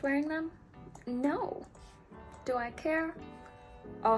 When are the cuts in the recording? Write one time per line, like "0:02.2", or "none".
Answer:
none